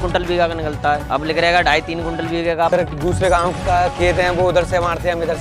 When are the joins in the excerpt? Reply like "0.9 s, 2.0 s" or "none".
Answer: 1.0 s, 2.7 s

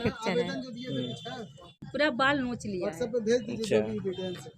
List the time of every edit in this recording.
1.8 s

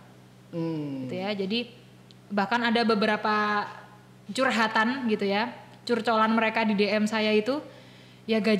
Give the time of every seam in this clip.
none

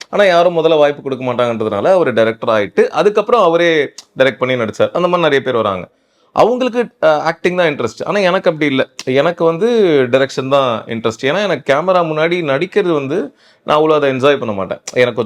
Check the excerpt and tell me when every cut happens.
none

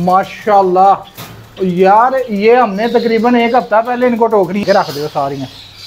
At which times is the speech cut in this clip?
4.6 s

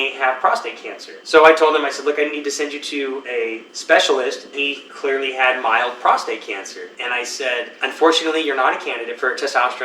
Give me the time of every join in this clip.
4.6 s, 6.9 s, 7.7 s

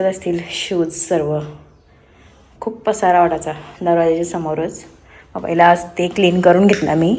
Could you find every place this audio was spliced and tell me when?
none

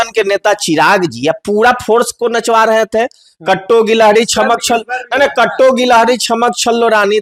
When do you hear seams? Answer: none

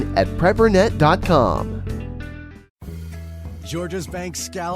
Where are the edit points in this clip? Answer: 2.7 s

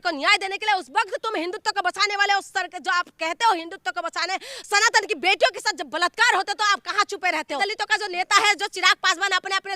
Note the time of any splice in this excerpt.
7.6 s

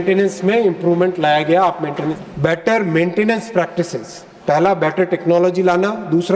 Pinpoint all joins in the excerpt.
2.2 s

